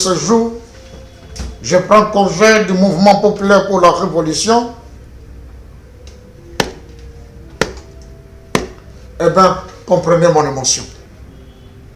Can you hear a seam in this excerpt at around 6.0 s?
no; 1 cut; at 11.0 s

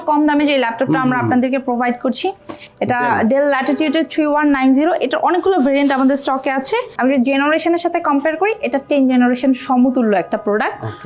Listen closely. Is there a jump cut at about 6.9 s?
yes; 1 cut; at 6.9 s

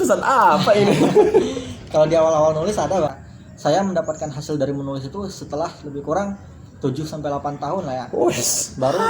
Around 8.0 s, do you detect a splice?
no; 1 cut; at 3.2 s

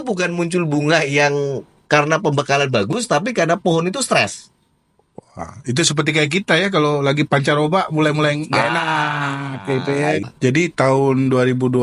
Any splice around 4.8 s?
no; 1 cut; at 10.2 s

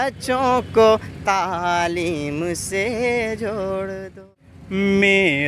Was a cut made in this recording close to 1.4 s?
no; 1 cut; at 4.1 s

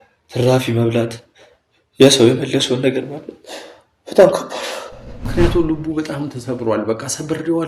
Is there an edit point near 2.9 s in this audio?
no; 1 cut; at 5.3 s

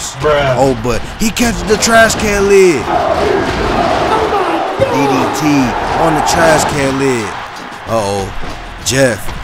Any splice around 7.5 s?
yes; 1 cut; at 7.5 s

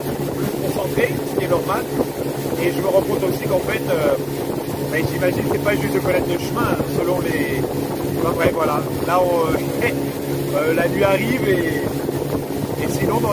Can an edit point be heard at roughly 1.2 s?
no; 0 cuts

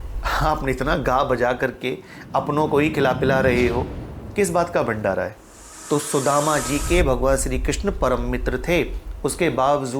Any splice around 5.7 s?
yes; 1 cut; at 5.7 s

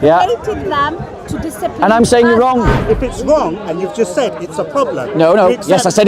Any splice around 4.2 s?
no; 1 cut; at 2.7 s

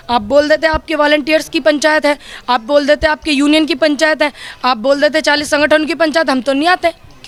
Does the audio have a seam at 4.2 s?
no; 0 cuts

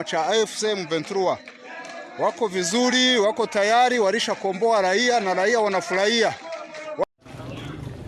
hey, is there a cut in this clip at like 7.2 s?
yes; 1 cut; at 7.2 s

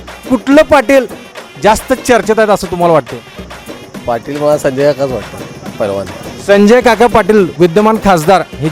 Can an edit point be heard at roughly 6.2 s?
yes; 1 cut; at 6.2 s

